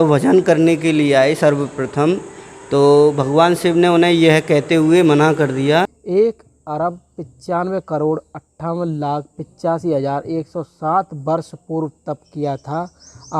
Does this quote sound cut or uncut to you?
cut